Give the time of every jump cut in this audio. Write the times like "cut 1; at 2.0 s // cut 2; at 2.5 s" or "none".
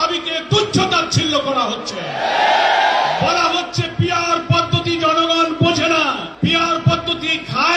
cut 1; at 6.3 s